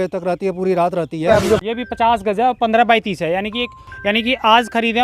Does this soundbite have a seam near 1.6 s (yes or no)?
yes